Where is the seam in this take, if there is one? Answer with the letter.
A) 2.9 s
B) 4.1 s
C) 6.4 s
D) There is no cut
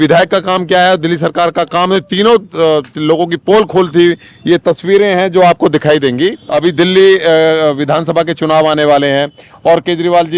C